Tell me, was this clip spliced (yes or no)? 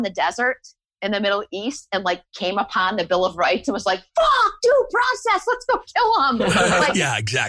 no